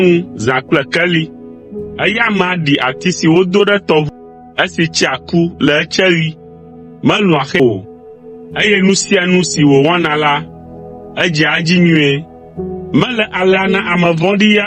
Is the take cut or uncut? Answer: cut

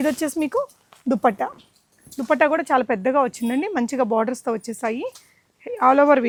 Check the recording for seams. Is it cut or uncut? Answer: uncut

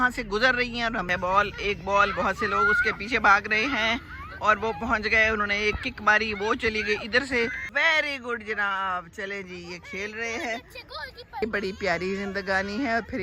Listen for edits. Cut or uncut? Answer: cut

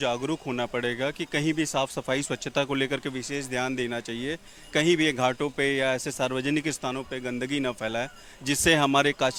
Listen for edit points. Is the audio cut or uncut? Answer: uncut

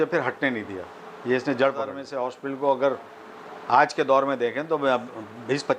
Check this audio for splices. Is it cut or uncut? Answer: cut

